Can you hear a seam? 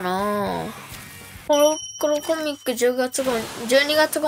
yes; 1 cut; at 1.2 s

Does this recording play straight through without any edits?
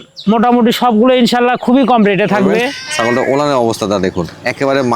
no; 1 cut; at 2.8 s

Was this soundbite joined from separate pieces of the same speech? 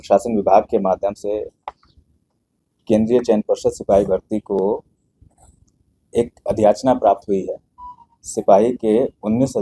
no; 0 cuts

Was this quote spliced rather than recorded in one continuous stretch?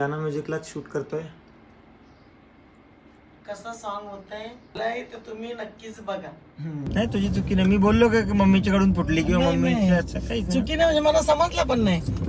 yes; 1 cut; at 6.9 s

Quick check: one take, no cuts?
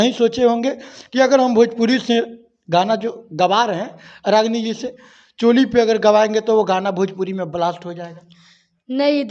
yes; 0 cuts

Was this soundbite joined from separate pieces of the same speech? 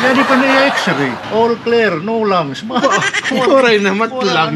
yes; 1 cut; at 1.3 s

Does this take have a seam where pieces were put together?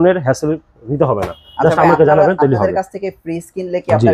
no; 0 cuts

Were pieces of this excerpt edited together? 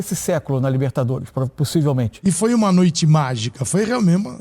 yes; 1 cut; at 2.1 s

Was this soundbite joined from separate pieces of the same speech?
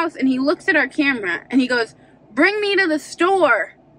no; 0 cuts

